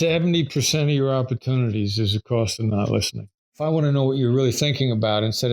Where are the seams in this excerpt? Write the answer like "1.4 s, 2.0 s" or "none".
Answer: 3.6 s